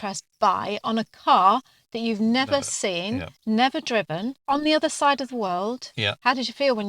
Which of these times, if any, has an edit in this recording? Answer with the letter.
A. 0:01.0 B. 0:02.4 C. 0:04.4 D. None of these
C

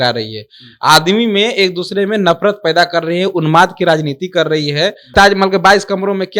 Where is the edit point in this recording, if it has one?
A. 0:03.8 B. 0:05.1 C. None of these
B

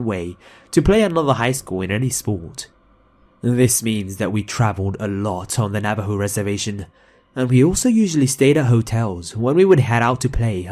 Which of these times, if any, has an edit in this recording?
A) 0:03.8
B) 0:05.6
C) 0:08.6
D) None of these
D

